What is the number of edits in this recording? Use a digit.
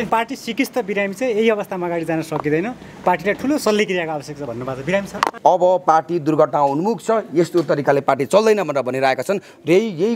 1